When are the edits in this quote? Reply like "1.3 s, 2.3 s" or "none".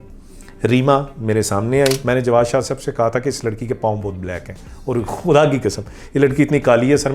2.0 s